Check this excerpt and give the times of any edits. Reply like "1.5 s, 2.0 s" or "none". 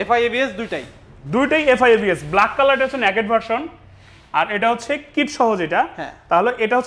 none